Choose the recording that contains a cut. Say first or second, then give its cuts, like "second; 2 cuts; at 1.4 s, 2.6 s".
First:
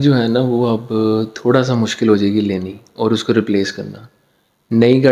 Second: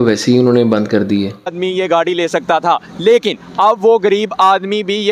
second; 1 cut; at 1.6 s